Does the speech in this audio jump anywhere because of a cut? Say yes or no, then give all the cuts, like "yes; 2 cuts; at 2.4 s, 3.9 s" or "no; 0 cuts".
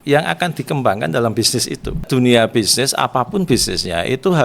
yes; 1 cut; at 2.0 s